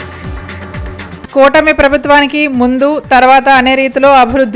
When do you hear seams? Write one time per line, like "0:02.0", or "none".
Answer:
0:01.1